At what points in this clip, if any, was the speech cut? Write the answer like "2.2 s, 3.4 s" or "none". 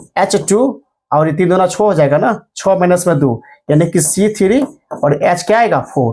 none